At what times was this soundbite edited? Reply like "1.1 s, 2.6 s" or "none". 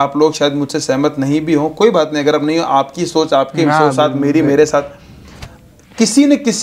none